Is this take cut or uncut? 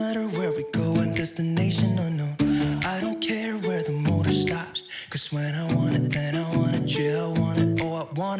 uncut